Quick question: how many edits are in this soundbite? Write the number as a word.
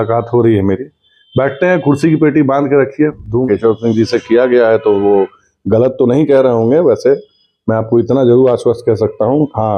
one